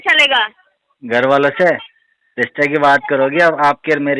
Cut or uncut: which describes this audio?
uncut